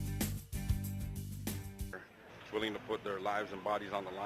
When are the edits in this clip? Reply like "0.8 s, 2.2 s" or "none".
1.6 s